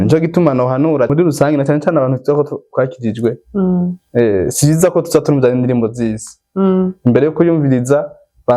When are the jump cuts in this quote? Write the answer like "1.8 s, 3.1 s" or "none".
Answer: 1.1 s